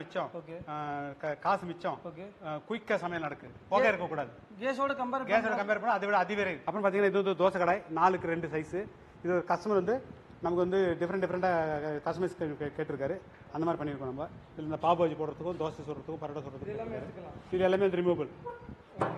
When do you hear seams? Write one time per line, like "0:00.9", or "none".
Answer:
0:03.5
0:06.6